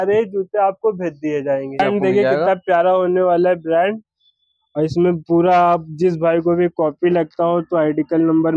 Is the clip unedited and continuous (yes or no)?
no